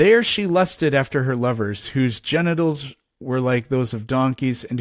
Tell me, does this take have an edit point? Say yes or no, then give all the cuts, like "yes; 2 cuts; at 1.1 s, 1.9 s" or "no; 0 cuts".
no; 0 cuts